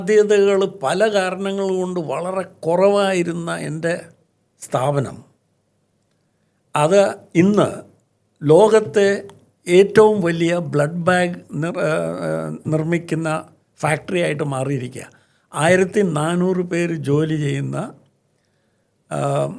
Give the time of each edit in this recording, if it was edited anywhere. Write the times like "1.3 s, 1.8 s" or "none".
none